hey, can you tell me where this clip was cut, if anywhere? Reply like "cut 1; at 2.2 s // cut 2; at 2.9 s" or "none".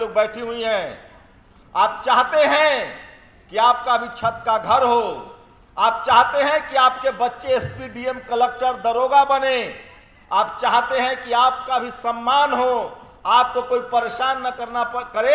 none